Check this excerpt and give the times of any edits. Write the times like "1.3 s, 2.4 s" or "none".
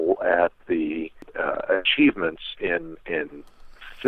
1.3 s